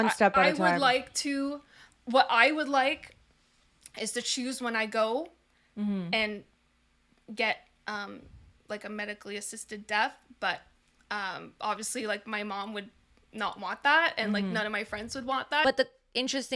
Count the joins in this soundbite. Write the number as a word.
one